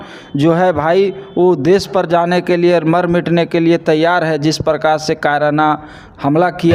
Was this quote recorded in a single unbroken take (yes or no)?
yes